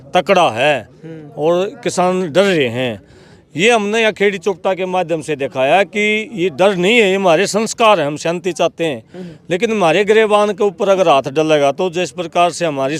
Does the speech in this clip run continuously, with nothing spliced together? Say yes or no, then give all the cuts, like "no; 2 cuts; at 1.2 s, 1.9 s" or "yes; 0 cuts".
yes; 0 cuts